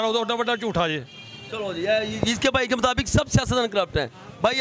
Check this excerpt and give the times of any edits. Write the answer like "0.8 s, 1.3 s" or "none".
none